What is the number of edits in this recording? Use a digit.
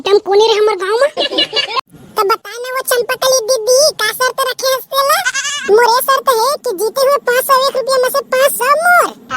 1